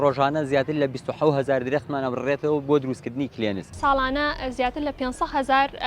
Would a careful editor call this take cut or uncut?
cut